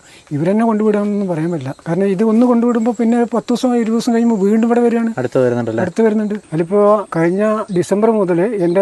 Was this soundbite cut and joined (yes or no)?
yes